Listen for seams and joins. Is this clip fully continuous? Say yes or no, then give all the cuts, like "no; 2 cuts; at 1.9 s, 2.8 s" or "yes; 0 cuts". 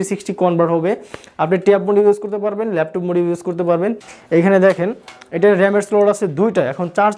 no; 1 cut; at 4.1 s